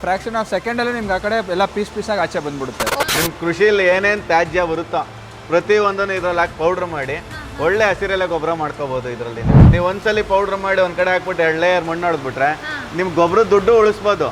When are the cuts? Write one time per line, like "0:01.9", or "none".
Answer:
0:03.0
0:09.6